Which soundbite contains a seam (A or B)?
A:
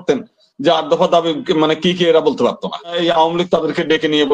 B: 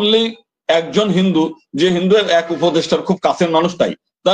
A